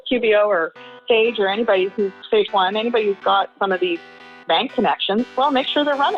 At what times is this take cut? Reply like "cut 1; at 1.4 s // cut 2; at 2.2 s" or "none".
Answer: none